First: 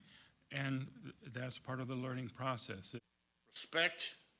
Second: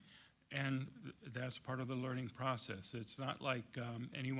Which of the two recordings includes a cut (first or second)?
first